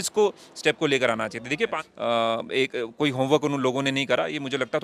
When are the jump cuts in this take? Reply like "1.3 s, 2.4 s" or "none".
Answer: 1.8 s